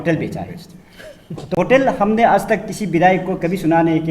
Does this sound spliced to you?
yes; 1 cut; at 1.5 s

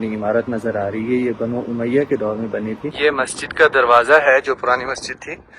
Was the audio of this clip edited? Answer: yes; 1 cut; at 2.9 s

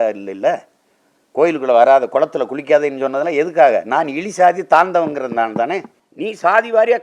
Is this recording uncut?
no; 1 cut; at 6.0 s

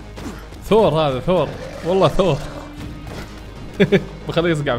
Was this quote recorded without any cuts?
yes; 0 cuts

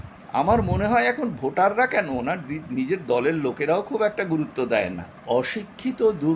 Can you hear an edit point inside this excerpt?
yes; 1 cut; at 5.1 s

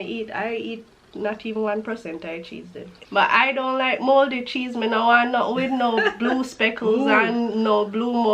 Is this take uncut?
no; 1 cut; at 2.9 s

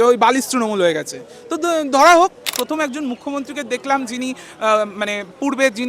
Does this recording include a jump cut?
yes; 1 cut; at 2.5 s

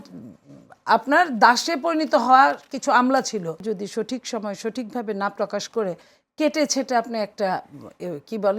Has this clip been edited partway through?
yes; 1 cut; at 3.6 s

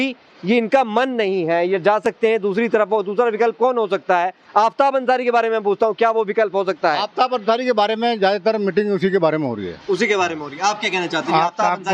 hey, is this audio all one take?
yes; 0 cuts

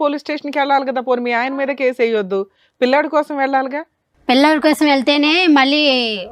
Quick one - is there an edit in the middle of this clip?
no; 0 cuts

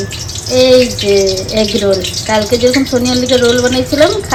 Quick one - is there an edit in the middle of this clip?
no; 0 cuts

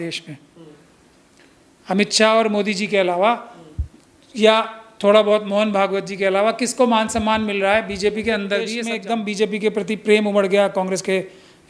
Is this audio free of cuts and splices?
no; 1 cut; at 8.8 s

